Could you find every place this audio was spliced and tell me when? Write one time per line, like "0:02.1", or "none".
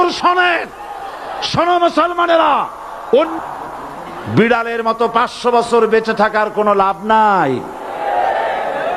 0:03.3